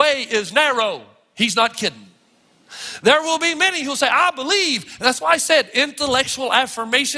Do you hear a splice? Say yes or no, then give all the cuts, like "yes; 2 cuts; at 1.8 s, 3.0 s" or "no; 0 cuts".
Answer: no; 0 cuts